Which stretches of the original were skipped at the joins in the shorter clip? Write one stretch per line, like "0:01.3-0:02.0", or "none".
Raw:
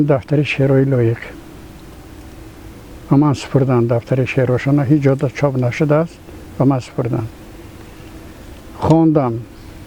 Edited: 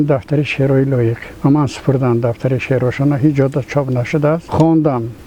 0:01.3-0:02.9
0:06.1-0:08.8